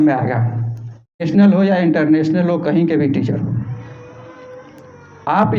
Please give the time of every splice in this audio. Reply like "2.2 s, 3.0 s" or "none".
1.2 s